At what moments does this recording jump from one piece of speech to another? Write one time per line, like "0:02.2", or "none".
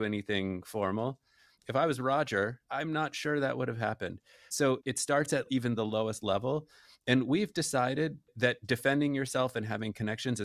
0:01.6
0:02.6
0:04.6